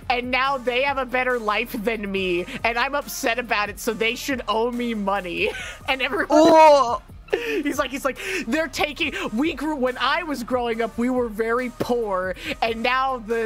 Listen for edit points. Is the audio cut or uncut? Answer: uncut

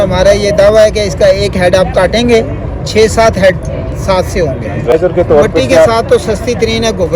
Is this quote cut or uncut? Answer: cut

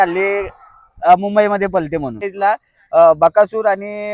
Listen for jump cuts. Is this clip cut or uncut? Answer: cut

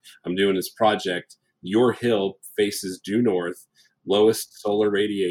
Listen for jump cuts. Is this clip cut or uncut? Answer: uncut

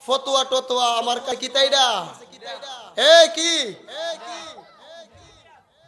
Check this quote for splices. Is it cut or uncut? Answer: cut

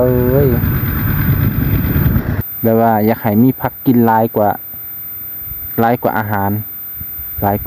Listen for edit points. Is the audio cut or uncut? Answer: cut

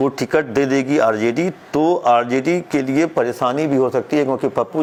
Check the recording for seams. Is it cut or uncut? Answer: uncut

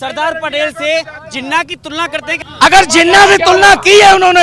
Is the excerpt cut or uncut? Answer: cut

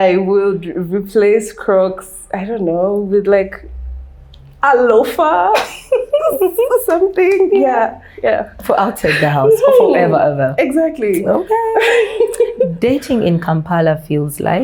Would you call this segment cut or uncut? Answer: uncut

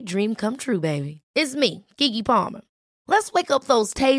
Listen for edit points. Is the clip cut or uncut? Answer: uncut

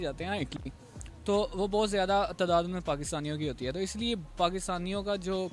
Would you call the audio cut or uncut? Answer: uncut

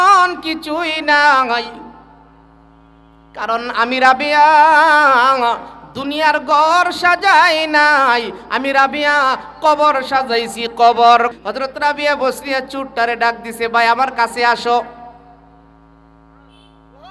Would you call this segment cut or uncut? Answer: cut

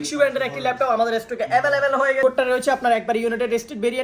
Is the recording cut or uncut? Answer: cut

